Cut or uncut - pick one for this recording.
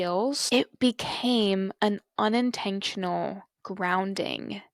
uncut